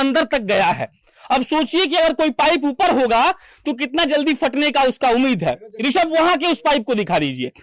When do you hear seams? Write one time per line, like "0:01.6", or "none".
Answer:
none